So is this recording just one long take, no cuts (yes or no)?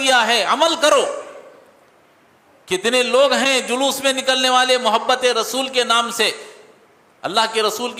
yes